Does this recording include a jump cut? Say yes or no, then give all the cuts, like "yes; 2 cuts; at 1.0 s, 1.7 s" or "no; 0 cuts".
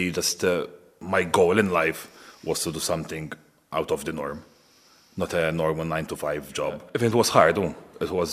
yes; 2 cuts; at 0.9 s, 6.9 s